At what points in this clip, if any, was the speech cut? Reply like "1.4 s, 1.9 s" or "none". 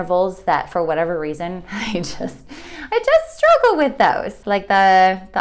4.3 s